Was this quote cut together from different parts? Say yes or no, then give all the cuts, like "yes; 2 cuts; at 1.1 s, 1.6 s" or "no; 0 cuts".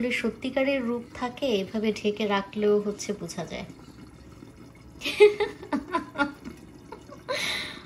no; 0 cuts